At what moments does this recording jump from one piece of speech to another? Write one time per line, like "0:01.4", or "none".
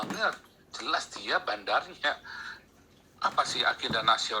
0:02.7